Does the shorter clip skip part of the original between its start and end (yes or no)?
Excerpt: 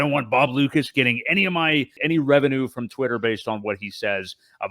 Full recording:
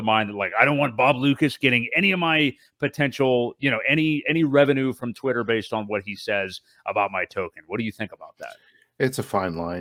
yes